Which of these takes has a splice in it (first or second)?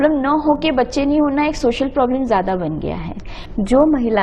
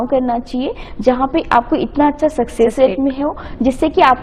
first